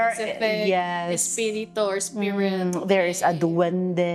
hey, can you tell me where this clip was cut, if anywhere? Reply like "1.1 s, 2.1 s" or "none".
none